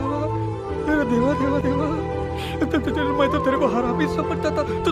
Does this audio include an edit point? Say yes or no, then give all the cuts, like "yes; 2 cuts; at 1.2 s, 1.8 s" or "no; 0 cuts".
no; 0 cuts